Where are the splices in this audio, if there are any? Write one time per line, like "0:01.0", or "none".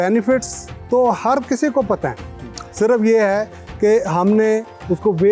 none